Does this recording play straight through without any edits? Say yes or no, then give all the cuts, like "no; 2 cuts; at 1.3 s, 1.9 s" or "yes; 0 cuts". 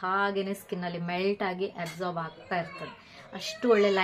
yes; 0 cuts